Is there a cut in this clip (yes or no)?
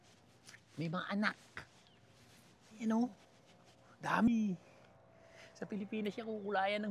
yes